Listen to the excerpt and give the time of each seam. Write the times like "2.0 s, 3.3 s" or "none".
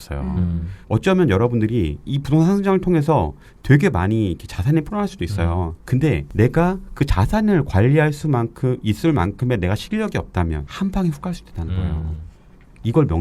2.0 s, 6.3 s, 10.7 s